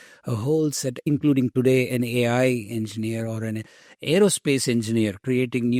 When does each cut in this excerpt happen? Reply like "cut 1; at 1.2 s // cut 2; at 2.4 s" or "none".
none